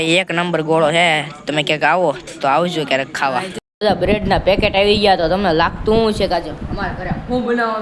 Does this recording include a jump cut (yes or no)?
yes